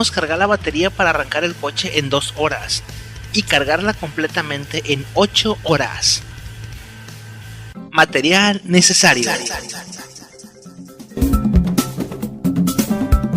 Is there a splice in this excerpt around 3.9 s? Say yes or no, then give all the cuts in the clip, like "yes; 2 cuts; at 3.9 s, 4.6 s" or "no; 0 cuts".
no; 0 cuts